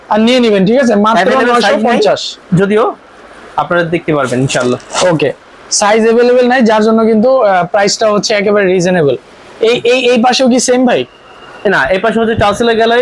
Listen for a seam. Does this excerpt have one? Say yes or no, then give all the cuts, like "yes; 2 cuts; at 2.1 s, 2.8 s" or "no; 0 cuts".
no; 0 cuts